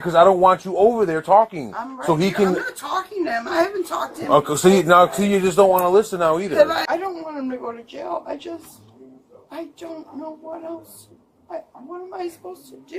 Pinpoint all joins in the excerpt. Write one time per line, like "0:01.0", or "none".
0:06.8